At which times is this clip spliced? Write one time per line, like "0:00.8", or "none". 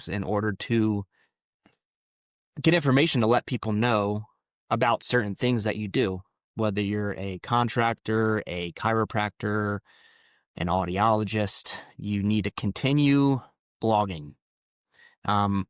none